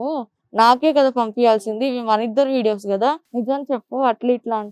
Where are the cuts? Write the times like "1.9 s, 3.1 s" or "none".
3.3 s